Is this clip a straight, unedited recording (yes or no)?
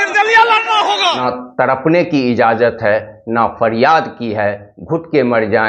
no